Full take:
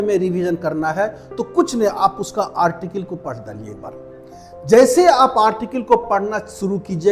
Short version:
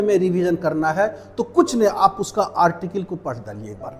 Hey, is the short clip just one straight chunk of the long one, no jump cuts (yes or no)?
yes